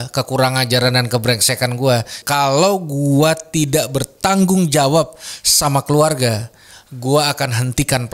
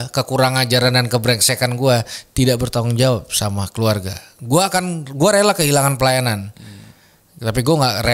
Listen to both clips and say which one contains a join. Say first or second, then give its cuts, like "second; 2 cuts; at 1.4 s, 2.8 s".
first; 1 cut; at 2.2 s